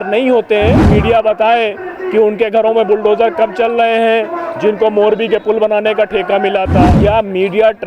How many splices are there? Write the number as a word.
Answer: two